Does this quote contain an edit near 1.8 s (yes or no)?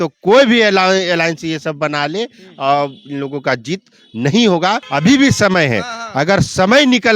no